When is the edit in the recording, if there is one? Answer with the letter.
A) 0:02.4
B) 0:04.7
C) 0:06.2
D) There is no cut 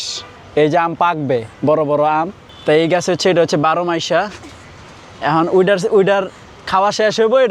A